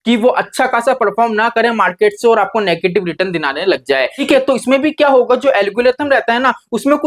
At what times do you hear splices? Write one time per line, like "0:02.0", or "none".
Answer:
0:04.2